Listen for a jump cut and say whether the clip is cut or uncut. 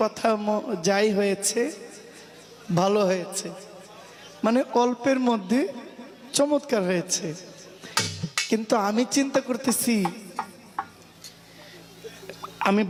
uncut